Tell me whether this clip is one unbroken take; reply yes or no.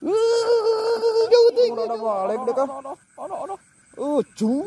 no